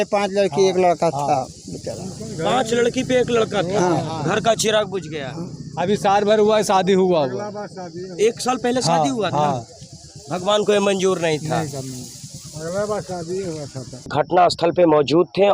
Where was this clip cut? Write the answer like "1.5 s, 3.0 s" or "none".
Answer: 14.1 s

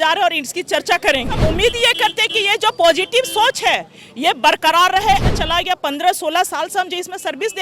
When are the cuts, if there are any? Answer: 1.4 s, 5.2 s

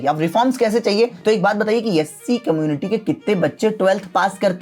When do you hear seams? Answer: 1.2 s

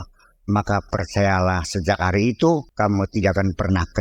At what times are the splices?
2.7 s

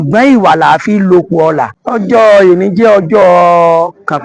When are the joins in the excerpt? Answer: 1.8 s

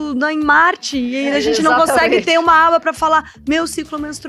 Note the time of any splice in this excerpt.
none

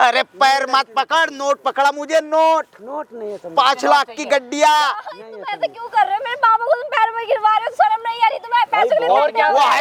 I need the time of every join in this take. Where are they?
none

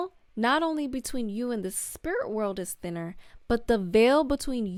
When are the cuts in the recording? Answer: none

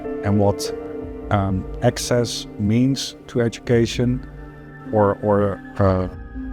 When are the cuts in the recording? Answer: none

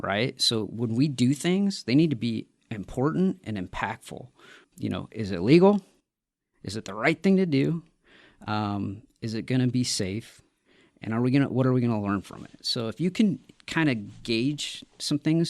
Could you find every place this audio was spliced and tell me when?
4.7 s

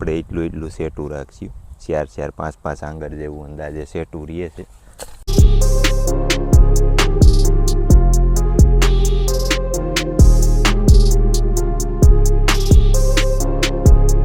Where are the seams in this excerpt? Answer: none

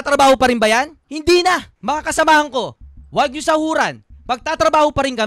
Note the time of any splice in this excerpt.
none

